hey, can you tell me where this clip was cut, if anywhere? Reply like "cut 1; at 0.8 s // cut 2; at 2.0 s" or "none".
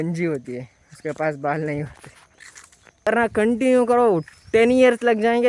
cut 1; at 3.0 s